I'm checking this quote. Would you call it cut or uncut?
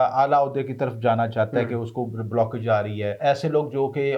cut